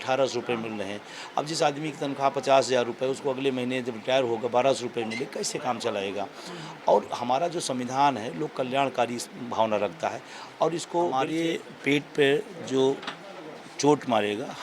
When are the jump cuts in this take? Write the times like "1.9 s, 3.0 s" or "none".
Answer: 11.3 s